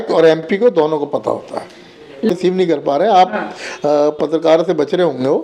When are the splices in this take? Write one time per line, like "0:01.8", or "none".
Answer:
0:02.3